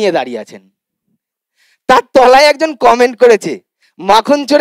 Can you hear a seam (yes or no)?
no